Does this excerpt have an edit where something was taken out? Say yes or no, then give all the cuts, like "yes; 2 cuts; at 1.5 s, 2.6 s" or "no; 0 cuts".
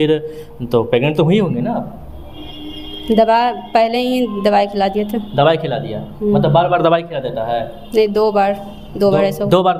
no; 0 cuts